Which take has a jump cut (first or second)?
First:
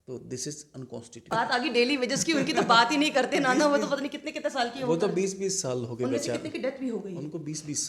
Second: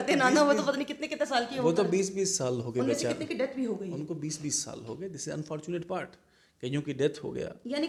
first